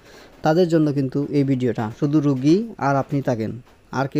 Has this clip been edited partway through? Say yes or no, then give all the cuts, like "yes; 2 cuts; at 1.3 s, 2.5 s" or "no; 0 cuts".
yes; 1 cut; at 1.9 s